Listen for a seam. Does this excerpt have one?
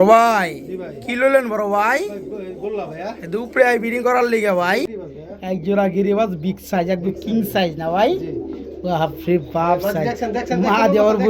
yes; 1 cut; at 5.0 s

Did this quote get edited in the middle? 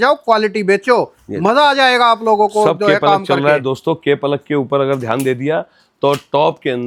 no; 0 cuts

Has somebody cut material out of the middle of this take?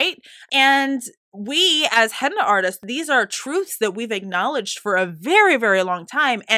yes; 1 cut; at 2.8 s

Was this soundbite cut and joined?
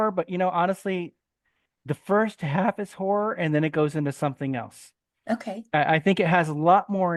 no; 0 cuts

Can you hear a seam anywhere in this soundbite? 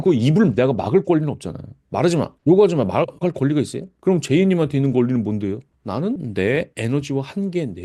yes; 2 cuts; at 3.9 s, 6.2 s

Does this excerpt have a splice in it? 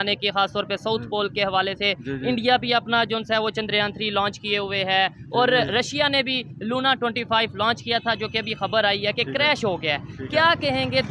no; 0 cuts

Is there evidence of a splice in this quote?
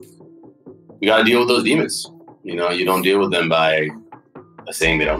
yes; 1 cut; at 4.1 s

